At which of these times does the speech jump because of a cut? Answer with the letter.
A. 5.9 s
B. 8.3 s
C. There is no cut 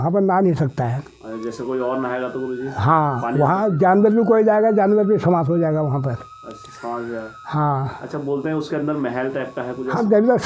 C